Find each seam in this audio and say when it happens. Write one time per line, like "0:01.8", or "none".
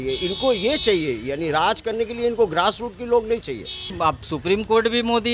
0:04.0